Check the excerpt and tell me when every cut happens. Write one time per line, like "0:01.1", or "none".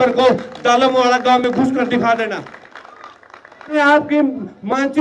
0:03.7